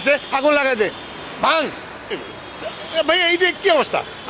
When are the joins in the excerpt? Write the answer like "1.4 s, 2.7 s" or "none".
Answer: none